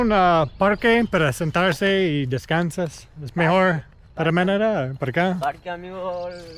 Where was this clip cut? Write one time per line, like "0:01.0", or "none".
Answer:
none